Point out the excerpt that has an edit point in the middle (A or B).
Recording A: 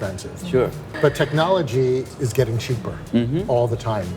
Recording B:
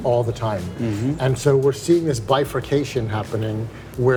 A